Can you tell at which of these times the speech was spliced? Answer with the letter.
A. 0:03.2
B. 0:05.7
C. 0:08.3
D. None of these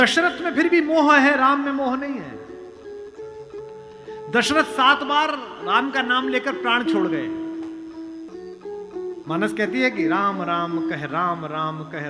C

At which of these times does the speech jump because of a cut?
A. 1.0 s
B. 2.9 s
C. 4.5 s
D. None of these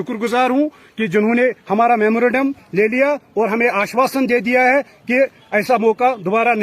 D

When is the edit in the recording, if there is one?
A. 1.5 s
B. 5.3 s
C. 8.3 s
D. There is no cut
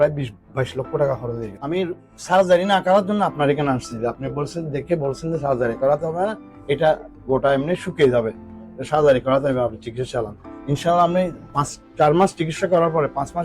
A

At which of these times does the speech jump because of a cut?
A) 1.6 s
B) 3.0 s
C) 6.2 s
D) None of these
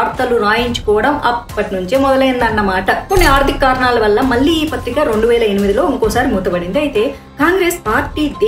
B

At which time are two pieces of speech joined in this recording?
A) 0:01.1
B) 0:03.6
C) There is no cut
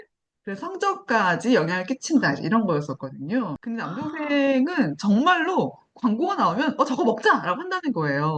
B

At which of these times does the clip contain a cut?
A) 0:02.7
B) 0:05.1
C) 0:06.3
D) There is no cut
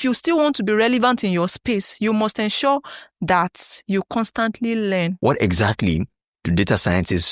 B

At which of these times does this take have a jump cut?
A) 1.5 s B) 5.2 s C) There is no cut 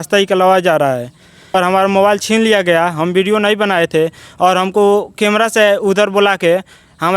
A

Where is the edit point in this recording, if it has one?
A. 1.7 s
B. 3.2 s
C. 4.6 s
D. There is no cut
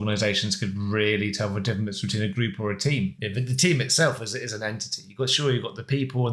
B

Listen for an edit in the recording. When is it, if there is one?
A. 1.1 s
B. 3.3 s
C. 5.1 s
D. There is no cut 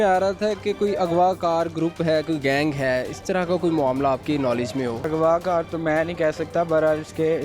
C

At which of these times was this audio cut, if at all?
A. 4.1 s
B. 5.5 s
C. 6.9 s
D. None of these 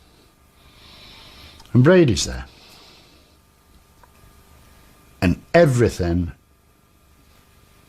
A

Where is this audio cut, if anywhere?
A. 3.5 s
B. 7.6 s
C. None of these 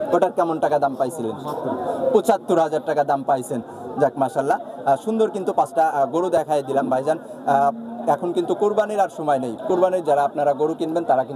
C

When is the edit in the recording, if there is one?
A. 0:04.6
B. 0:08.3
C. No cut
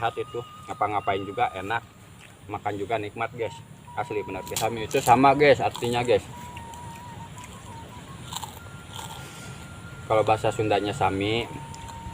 A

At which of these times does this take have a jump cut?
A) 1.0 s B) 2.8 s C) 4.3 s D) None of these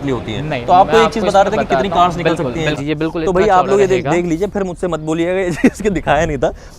B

